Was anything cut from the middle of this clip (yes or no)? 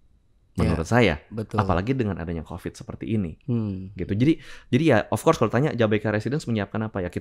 no